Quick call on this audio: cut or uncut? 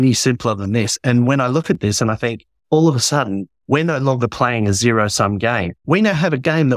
cut